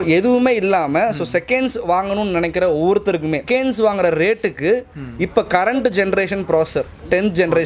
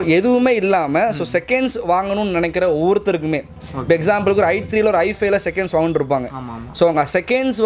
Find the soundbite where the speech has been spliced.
first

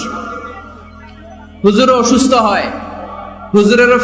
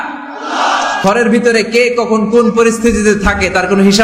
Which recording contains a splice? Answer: second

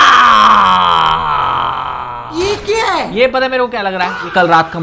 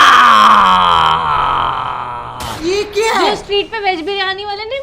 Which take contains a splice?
first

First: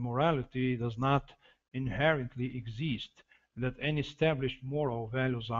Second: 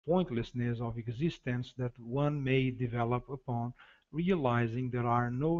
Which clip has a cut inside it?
first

